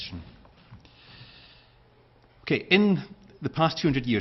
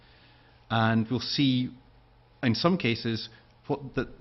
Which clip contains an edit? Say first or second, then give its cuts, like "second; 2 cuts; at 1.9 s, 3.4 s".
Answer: first; 1 cut; at 2.3 s